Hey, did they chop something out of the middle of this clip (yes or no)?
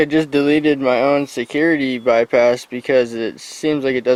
no